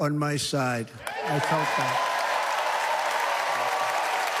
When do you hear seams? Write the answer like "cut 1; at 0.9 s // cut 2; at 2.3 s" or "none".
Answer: none